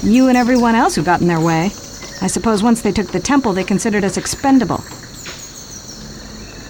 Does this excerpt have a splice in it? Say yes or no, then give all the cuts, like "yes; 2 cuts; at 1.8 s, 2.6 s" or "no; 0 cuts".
no; 0 cuts